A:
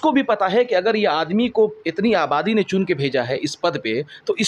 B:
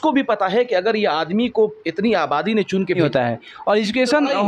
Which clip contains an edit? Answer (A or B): B